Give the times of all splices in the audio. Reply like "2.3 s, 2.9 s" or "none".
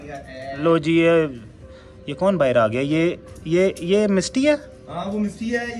none